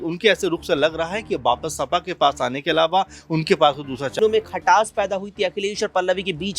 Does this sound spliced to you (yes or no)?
yes